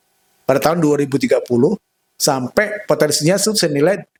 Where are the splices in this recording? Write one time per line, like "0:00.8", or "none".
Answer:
none